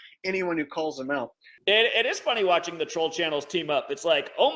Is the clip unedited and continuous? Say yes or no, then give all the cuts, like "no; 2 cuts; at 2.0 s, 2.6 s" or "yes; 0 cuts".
no; 1 cut; at 1.5 s